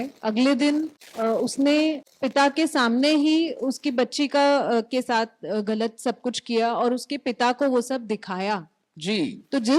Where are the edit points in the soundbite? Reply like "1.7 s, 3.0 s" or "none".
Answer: 1.0 s, 2.1 s